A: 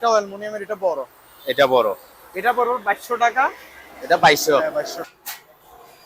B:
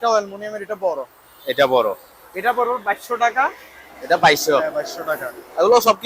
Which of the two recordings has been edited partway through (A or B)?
A